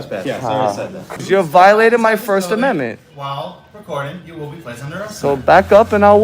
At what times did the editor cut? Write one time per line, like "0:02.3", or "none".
0:01.1